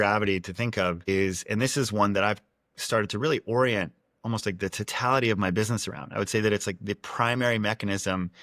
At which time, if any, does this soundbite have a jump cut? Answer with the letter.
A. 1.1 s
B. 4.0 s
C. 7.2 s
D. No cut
A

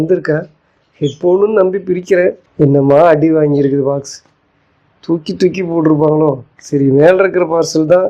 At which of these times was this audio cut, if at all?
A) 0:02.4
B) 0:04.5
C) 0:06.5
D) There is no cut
A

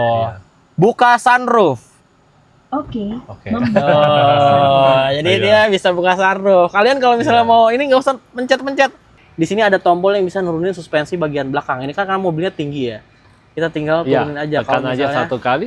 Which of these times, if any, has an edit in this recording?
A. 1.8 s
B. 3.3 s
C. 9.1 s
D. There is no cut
C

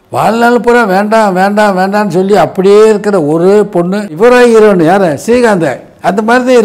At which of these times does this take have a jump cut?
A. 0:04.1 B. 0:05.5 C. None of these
A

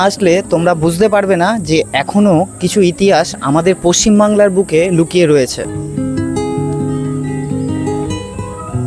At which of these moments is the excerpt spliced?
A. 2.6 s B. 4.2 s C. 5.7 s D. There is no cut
C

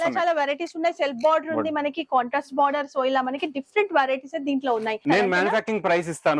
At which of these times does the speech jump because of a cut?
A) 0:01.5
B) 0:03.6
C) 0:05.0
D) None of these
C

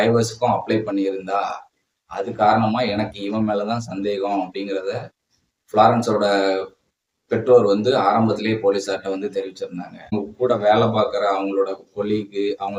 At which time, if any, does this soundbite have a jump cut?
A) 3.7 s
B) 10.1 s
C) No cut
B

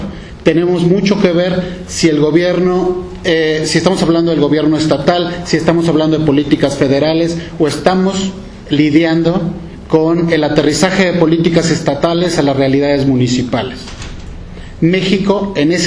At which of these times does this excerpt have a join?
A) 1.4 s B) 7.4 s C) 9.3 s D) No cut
B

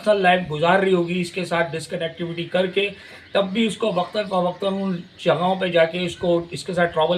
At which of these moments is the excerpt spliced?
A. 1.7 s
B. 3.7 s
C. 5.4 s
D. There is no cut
D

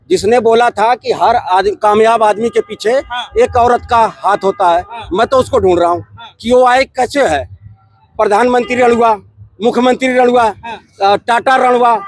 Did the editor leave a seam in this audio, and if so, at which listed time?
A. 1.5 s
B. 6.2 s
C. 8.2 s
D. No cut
D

